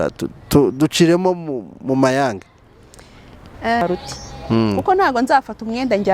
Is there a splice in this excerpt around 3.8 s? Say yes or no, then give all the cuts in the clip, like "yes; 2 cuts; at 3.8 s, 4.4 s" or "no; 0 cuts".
yes; 1 cut; at 3.8 s